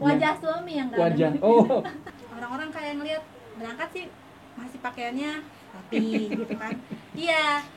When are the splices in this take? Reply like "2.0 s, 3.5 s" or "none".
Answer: 2.0 s